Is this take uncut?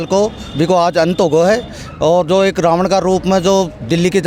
yes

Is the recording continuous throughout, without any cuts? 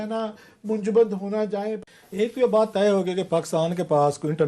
no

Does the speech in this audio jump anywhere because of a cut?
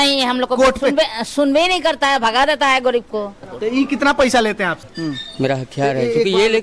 yes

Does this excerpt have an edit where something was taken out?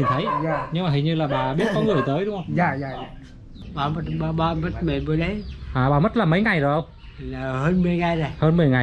yes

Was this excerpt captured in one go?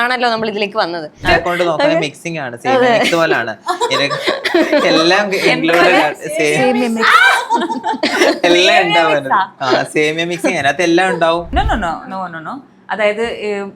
no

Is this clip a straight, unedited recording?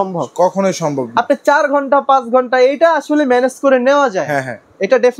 yes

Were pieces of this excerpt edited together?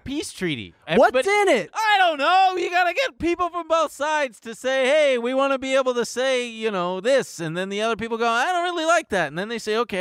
no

